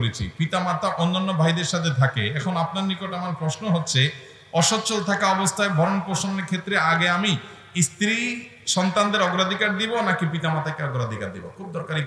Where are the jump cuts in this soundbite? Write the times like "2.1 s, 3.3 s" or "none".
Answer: none